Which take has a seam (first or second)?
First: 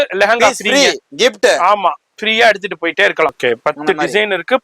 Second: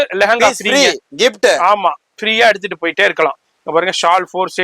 first